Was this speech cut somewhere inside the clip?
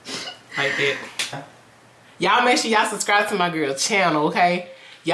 yes; 1 cut; at 1.4 s

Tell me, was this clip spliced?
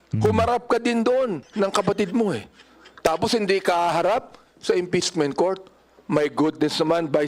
yes; 1 cut; at 1.4 s

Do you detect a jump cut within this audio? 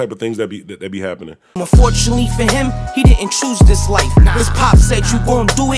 yes; 1 cut; at 1.5 s

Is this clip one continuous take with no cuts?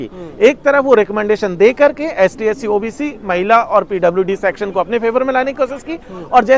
yes; 0 cuts

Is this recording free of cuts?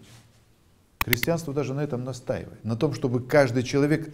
no; 2 cuts; at 0.9 s, 2.5 s

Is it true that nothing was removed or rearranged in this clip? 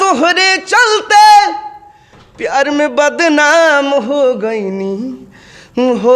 yes; 0 cuts

